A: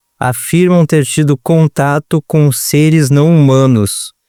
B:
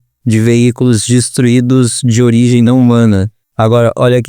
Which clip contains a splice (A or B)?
B